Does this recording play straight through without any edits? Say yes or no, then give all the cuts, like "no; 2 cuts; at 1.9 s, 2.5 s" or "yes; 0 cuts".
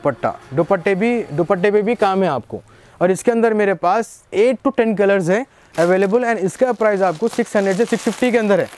yes; 0 cuts